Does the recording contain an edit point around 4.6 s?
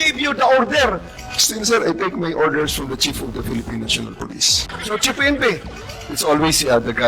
yes; 1 cut; at 4.6 s

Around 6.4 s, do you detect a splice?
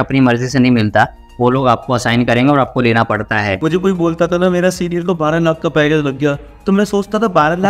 no; 1 cut; at 3.6 s

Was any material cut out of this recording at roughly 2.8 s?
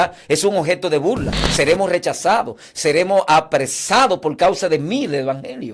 no; 1 cut; at 1.4 s

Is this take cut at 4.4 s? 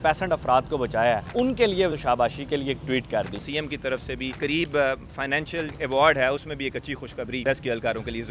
yes; 4 cuts; at 1.7 s, 3.4 s, 4.4 s, 5.7 s

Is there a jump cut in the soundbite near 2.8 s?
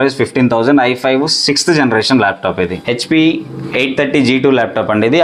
yes; 1 cut; at 2.8 s

